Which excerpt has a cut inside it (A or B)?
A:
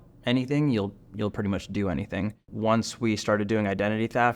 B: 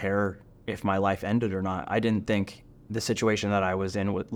A